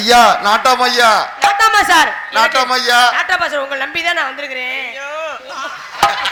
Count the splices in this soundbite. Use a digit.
0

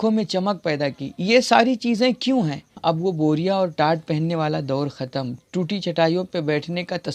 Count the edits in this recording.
1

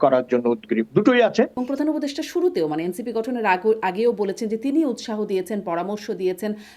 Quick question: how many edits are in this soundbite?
1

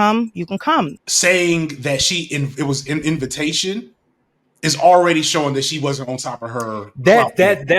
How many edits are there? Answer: 1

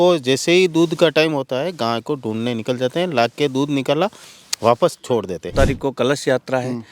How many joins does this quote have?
1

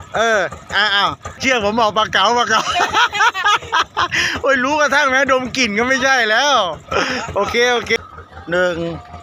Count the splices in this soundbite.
2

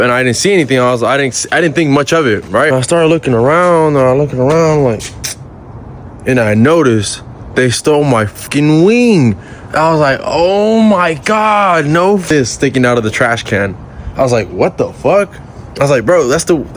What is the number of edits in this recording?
2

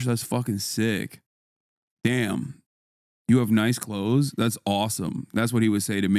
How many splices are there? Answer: 0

